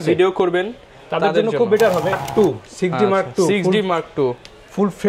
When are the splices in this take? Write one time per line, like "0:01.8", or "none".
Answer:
0:02.2